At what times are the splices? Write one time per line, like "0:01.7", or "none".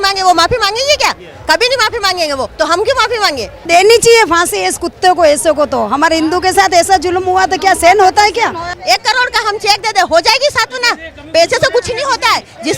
0:03.6
0:08.7